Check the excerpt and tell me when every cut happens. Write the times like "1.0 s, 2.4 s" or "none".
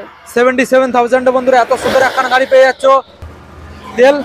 3.2 s